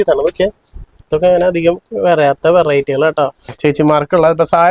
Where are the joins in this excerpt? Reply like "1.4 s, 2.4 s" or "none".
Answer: 3.5 s